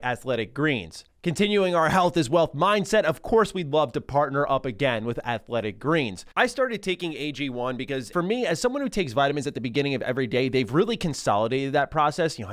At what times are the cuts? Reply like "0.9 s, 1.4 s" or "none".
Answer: none